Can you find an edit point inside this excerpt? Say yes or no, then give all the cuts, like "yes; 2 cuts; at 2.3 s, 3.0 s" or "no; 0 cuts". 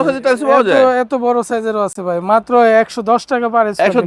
no; 0 cuts